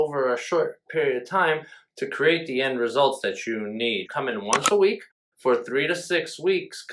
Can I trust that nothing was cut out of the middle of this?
no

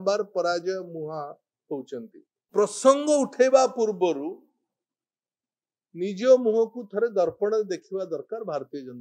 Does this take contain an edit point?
yes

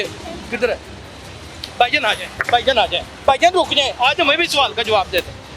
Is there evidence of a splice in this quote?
no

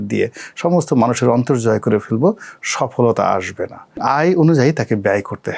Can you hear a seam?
yes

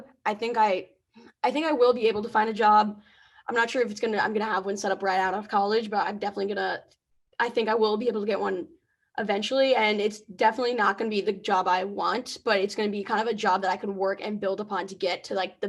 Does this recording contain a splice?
no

